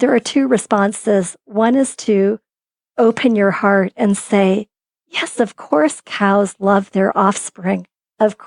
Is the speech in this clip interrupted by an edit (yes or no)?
no